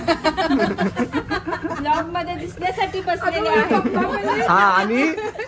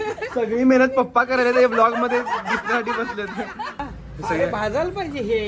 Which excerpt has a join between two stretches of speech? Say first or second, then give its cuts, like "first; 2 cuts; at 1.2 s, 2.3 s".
second; 1 cut; at 3.8 s